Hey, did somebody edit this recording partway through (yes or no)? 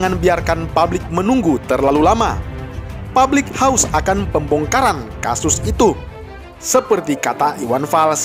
no